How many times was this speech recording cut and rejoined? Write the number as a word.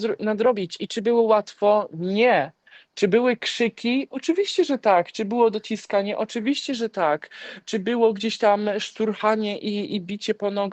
zero